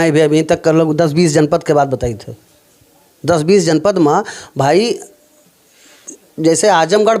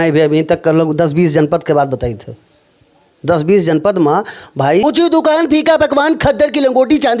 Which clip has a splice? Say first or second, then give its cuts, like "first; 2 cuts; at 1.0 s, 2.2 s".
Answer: second; 1 cut; at 4.8 s